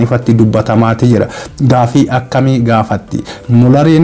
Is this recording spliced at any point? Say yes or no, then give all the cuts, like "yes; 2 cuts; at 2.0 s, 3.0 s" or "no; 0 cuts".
no; 0 cuts